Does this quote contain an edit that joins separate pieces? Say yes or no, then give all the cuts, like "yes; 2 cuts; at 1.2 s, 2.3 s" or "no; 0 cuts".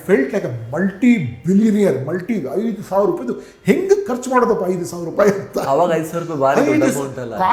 no; 0 cuts